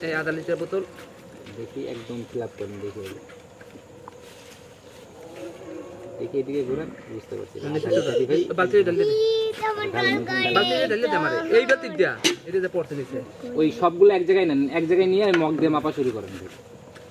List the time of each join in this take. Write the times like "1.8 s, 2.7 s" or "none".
none